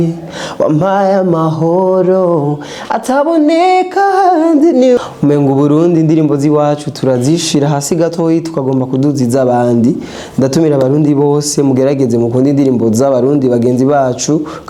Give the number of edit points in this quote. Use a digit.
1